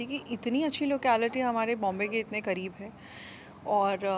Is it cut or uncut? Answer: uncut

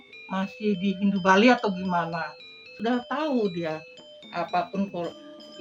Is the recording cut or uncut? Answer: cut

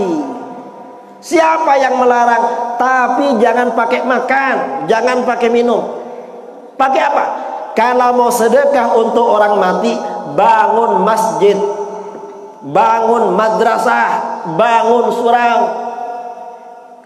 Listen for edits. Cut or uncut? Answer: uncut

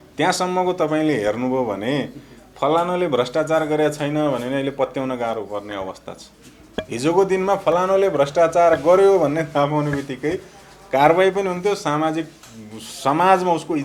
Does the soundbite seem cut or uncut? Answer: uncut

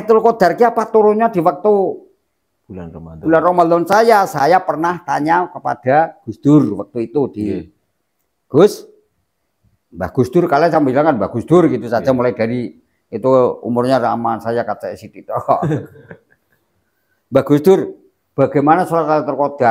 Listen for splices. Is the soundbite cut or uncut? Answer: uncut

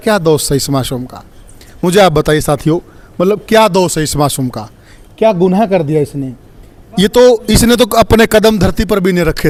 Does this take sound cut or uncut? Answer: uncut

